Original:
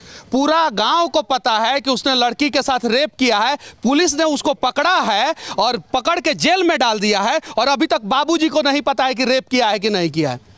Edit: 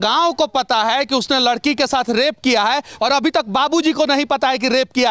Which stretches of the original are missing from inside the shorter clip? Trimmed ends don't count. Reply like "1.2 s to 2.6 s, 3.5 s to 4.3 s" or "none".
3.7 s to 7.5 s